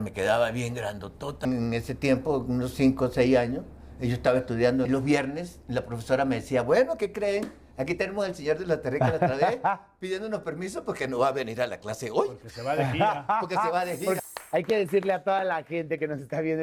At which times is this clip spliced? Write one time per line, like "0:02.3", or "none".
0:01.5
0:04.9
0:14.2